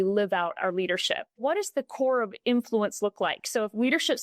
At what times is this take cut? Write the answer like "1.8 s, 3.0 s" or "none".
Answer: 1.4 s